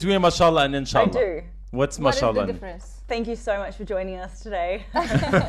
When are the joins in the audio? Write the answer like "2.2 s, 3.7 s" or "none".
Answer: none